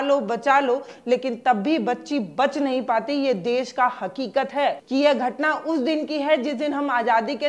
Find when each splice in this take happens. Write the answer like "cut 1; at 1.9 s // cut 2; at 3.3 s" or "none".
cut 1; at 4.8 s